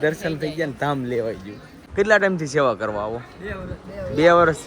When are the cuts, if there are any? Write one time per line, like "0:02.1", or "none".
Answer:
0:01.8